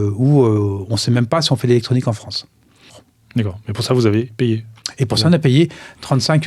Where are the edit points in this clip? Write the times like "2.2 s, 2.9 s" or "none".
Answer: 3.1 s